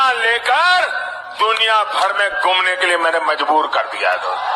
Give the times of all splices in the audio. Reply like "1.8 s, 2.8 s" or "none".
none